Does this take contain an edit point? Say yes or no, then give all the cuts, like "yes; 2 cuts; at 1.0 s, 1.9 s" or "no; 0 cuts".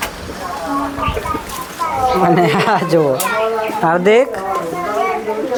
no; 0 cuts